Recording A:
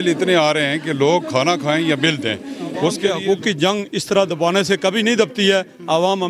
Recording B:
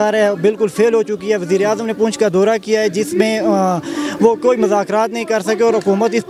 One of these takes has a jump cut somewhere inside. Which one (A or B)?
A